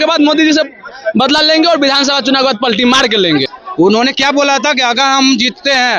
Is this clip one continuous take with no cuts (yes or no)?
no